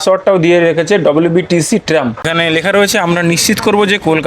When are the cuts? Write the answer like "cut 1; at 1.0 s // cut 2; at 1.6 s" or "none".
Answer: cut 1; at 2.3 s